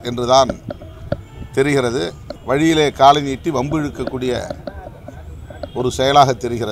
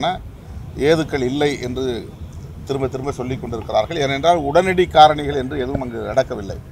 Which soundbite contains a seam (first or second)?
first